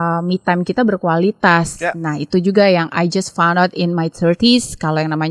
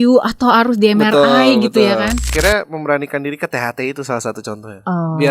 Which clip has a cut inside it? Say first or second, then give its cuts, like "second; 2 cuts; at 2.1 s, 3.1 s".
second; 1 cut; at 2.3 s